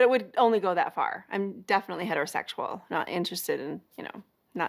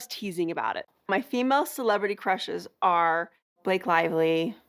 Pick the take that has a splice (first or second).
second